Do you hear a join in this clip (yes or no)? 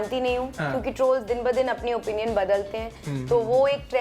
no